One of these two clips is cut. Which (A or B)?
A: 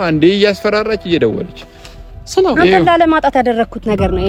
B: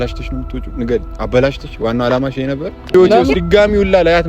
B